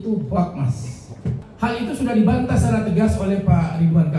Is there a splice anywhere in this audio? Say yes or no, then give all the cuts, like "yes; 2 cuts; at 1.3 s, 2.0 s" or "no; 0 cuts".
yes; 1 cut; at 1.3 s